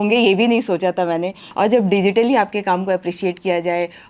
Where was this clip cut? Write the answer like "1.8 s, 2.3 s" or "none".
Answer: 1.4 s